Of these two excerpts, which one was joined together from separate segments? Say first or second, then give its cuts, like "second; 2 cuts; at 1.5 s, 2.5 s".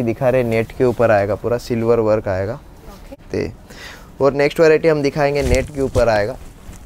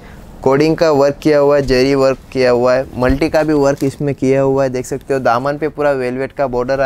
first; 1 cut; at 3.2 s